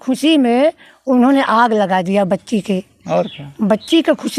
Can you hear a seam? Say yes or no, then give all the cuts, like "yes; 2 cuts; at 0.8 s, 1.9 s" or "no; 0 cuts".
no; 0 cuts